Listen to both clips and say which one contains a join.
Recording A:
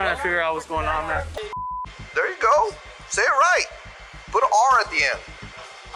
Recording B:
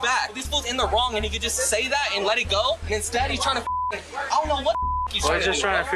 A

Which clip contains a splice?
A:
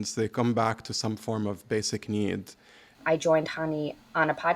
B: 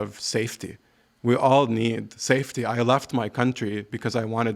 A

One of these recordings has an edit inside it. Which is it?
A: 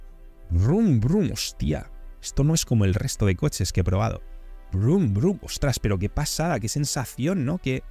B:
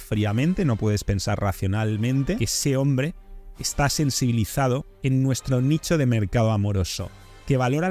B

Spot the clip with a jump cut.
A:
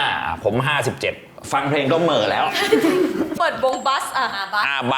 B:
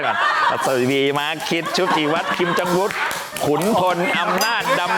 A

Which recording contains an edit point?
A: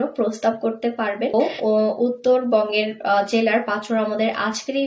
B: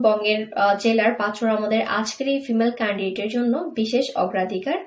A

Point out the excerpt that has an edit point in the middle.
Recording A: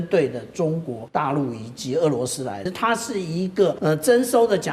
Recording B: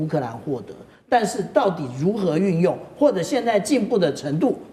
A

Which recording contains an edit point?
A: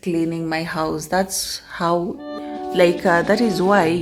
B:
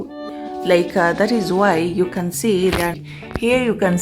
B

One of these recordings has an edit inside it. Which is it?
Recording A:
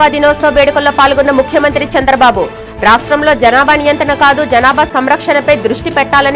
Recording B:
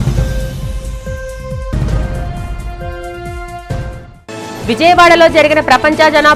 B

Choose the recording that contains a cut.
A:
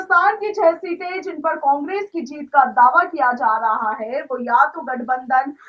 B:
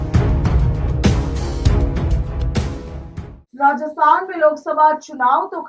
B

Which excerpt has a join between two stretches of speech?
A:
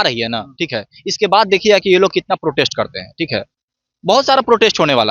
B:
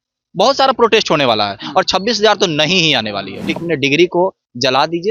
B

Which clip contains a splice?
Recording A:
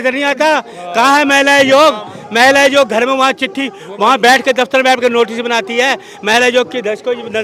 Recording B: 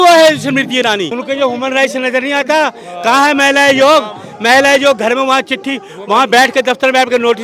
B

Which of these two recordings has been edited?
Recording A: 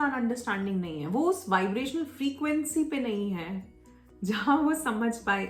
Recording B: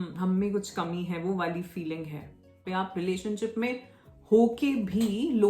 B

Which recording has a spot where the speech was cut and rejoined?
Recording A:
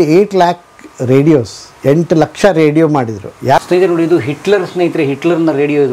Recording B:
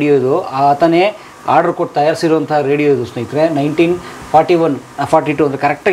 A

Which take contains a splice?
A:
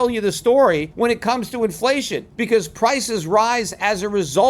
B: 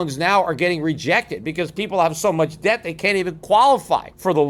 A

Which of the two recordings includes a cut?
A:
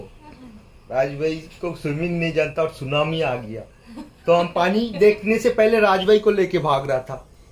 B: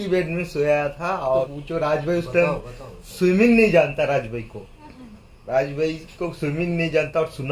B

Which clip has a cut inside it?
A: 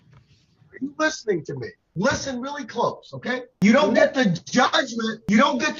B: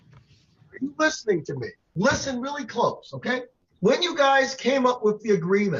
A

